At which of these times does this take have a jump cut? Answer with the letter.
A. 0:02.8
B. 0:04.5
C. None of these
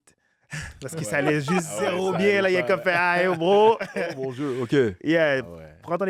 C